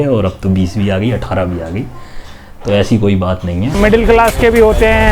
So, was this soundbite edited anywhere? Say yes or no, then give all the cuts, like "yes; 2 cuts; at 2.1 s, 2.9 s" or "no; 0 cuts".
yes; 1 cut; at 3.6 s